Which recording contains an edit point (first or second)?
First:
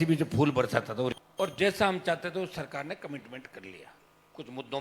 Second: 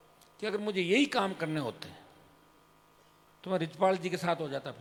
first